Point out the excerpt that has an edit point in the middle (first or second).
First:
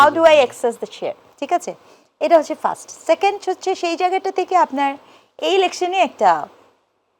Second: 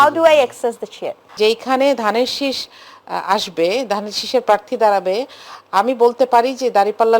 second